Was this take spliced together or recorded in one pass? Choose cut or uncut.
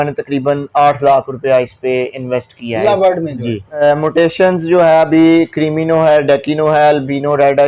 cut